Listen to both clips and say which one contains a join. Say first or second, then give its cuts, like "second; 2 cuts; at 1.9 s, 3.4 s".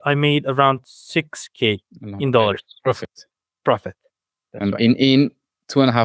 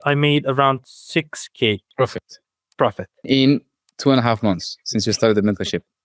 second; 2 cuts; at 1.9 s, 3.3 s